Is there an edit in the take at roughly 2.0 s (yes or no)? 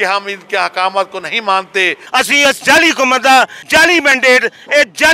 yes